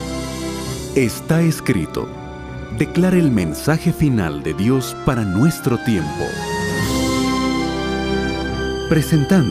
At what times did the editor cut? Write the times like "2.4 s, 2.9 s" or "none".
1.9 s